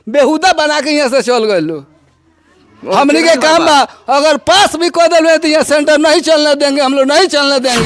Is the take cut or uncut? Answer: uncut